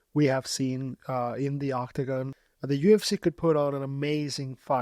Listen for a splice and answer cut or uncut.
cut